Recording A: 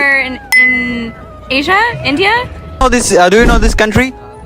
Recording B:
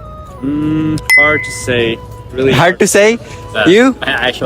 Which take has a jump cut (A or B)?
A